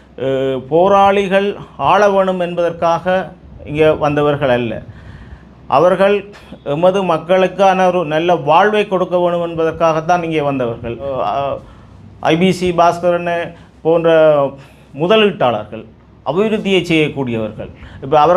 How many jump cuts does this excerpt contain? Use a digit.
1